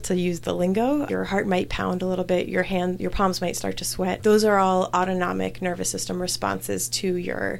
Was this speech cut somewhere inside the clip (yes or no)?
yes